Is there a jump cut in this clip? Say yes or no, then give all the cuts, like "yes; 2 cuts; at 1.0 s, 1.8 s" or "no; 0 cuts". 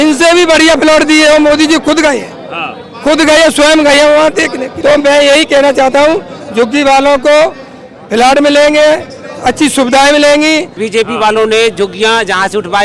yes; 2 cuts; at 4.6 s, 10.8 s